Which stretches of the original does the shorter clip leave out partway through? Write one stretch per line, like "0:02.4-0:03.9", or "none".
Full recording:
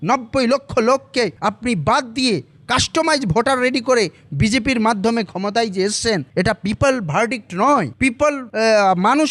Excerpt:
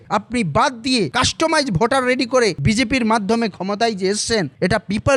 0:02.4-0:02.7
0:04.1-0:04.3